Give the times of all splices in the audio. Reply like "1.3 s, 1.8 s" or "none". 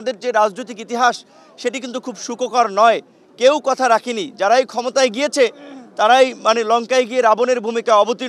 none

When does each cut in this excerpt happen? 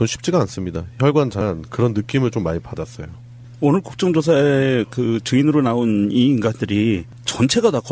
none

